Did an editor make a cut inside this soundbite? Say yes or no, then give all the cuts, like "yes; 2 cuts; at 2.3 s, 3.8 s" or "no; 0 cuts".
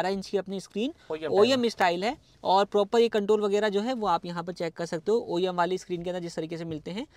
no; 0 cuts